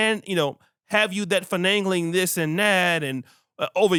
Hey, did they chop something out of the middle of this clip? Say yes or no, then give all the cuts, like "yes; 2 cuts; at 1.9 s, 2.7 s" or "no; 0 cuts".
no; 0 cuts